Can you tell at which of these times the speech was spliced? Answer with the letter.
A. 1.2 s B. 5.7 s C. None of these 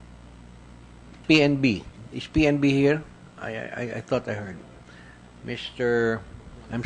C